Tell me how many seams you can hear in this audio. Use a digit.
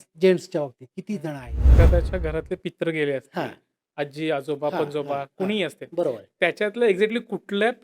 1